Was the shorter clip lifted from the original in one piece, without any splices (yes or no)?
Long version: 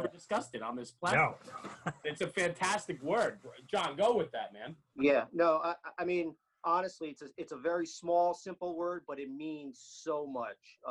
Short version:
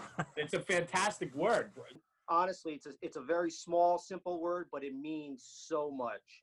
no